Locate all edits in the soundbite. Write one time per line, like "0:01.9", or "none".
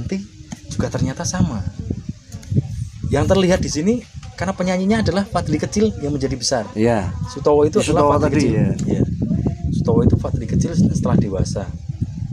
none